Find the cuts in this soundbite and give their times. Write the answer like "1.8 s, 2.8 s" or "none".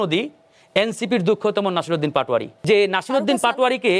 2.5 s